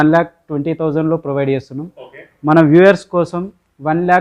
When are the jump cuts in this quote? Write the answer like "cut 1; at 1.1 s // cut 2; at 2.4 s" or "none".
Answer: none